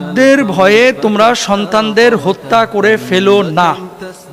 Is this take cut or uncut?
uncut